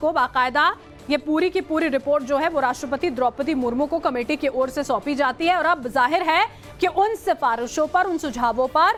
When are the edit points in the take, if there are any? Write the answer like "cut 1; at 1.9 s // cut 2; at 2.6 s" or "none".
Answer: none